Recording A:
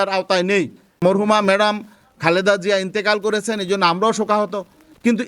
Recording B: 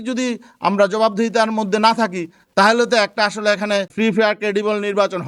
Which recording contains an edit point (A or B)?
A